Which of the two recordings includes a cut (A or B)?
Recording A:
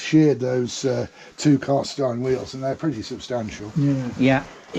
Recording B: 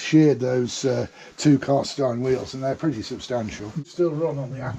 B